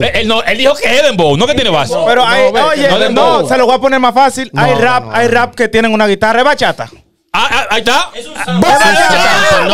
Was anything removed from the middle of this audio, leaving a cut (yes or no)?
no